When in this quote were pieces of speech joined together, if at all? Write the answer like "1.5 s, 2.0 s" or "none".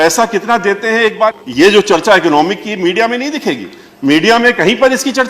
1.3 s